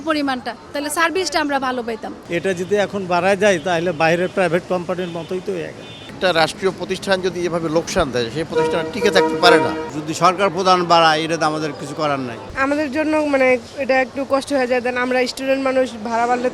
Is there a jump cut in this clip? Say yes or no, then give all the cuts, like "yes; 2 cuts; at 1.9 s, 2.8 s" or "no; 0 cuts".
yes; 4 cuts; at 2.1 s, 6.1 s, 9.9 s, 12.4 s